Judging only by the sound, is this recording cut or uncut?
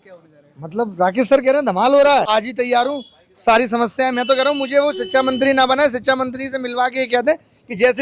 cut